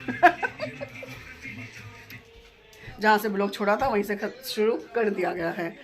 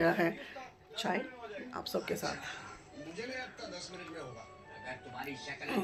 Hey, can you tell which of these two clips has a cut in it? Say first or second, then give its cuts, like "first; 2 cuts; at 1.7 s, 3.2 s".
first; 1 cut; at 2.8 s